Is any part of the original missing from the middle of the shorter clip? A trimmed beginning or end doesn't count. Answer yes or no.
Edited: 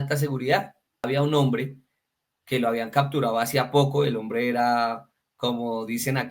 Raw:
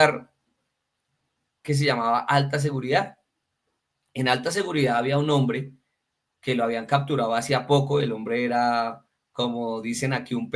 yes